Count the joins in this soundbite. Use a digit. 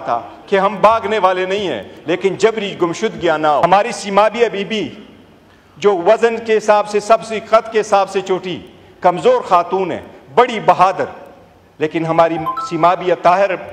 1